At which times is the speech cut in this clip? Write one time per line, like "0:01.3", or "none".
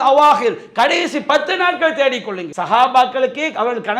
0:02.5